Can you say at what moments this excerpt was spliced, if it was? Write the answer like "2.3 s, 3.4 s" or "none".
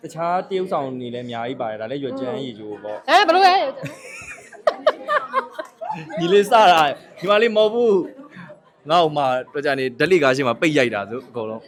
none